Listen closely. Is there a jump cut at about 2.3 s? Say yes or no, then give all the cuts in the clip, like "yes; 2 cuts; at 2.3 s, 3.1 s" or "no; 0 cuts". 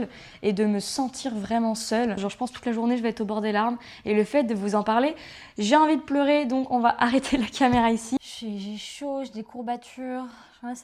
yes; 2 cuts; at 2.3 s, 8.2 s